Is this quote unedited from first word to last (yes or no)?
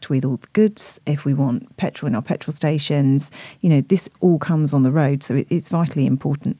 yes